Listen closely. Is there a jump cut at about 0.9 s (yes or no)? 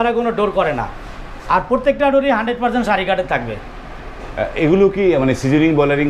no